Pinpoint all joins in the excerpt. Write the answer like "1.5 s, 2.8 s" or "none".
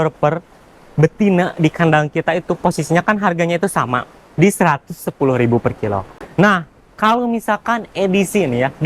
6.2 s

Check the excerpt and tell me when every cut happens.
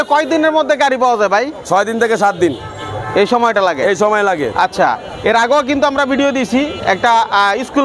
none

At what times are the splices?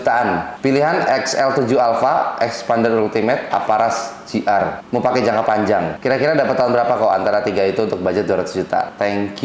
none

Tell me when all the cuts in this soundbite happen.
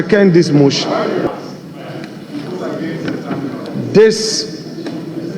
1.3 s

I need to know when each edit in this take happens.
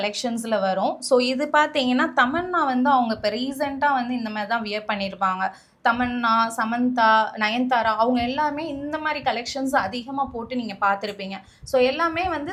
none

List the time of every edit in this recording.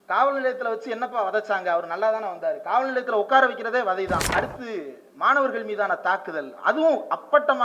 4.3 s

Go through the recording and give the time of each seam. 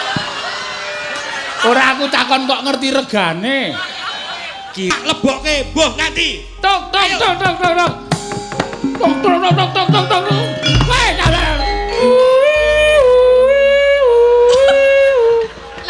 4.9 s

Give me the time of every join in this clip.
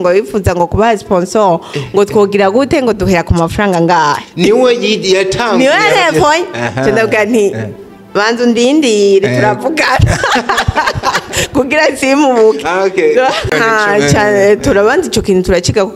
13.5 s

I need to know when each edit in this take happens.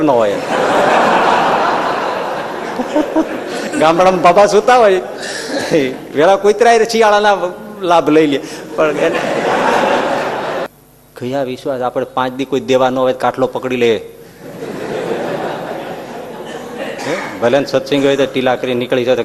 10.7 s

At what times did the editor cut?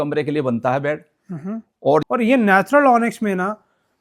2.0 s

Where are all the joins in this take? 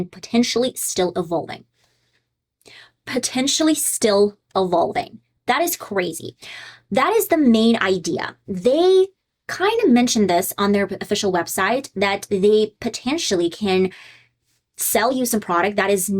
none

